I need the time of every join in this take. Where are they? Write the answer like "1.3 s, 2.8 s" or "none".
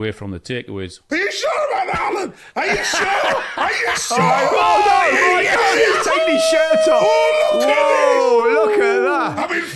1.0 s